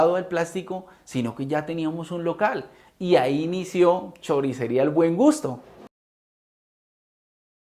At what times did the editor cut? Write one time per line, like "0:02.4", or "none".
none